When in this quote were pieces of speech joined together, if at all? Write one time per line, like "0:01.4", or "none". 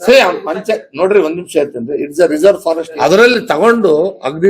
0:02.9